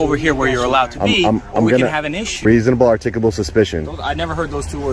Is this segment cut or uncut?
cut